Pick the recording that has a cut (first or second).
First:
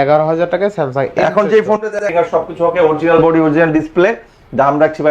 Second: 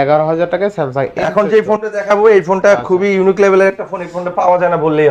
first